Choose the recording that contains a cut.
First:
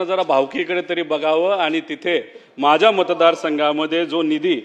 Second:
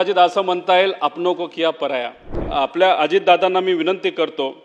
second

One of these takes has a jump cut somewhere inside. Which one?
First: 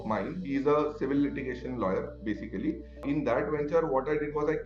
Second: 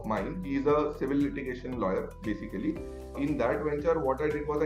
first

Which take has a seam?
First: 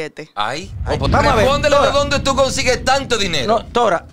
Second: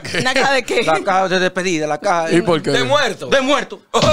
first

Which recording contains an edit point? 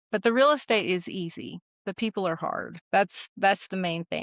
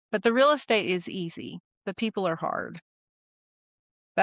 first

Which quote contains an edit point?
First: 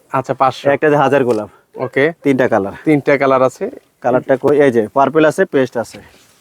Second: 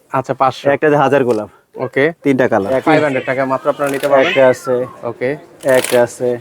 second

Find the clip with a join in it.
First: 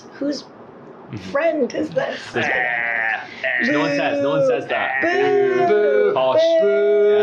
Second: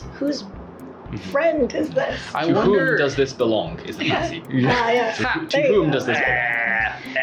first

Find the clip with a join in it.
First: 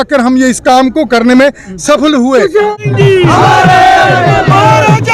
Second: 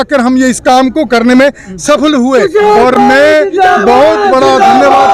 first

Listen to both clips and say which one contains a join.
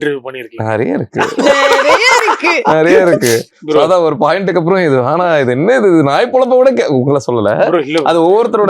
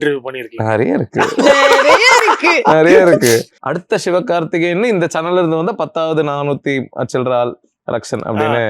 second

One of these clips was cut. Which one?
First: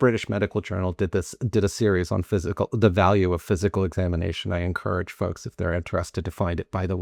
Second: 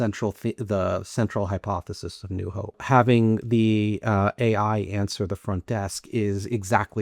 second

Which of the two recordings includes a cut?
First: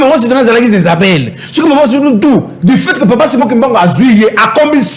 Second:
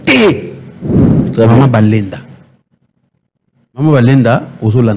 second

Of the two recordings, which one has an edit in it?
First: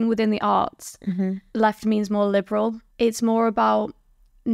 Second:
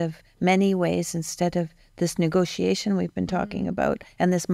first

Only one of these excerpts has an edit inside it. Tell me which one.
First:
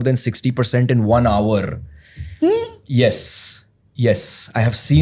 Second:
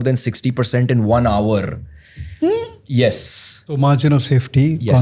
second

